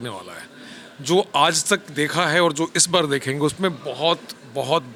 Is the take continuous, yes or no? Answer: yes